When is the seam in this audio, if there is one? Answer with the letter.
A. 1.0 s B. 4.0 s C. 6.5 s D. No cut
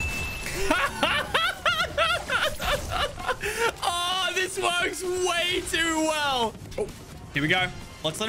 C